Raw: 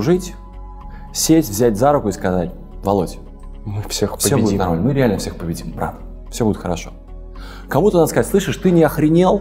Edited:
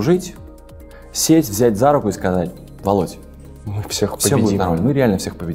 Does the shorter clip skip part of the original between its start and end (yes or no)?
no